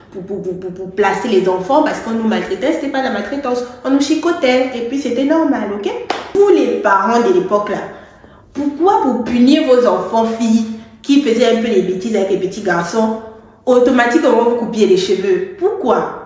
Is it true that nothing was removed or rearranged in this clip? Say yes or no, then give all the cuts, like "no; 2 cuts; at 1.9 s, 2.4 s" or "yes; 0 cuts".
no; 1 cut; at 6.3 s